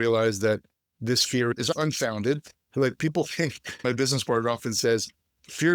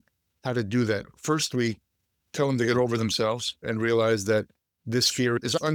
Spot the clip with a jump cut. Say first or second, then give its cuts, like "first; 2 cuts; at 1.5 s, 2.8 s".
first; 1 cut; at 3.8 s